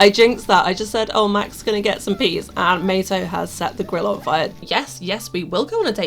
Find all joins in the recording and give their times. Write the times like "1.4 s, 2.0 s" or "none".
4.6 s